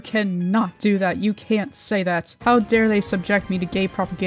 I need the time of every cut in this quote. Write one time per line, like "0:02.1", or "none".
0:02.3